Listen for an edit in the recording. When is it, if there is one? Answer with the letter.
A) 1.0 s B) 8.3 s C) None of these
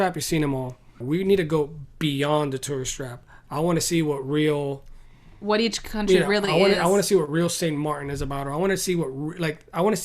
A